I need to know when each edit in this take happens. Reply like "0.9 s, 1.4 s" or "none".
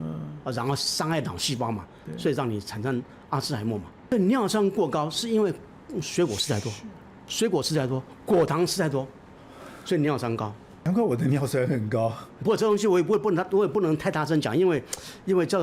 3.9 s, 10.8 s, 12.3 s